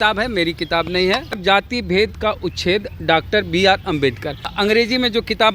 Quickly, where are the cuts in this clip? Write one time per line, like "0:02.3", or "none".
0:01.4
0:04.5